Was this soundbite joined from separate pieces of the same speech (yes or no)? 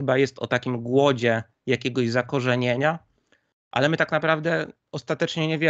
no